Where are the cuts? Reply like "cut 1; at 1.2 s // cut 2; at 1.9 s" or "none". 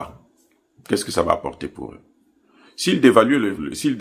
none